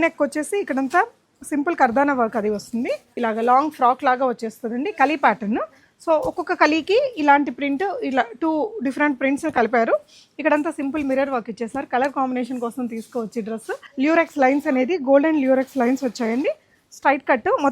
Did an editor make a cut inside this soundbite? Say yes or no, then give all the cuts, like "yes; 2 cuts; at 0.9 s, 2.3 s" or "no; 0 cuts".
yes; 2 cuts; at 3.1 s, 13.8 s